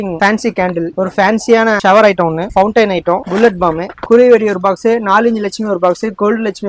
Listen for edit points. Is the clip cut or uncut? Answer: uncut